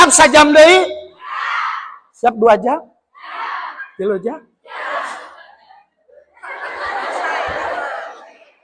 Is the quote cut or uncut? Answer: uncut